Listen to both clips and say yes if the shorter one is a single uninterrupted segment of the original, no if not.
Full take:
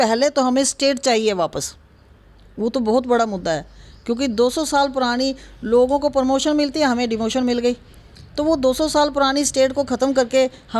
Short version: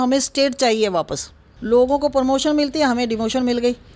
no